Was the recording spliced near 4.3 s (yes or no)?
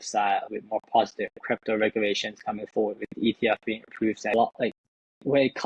yes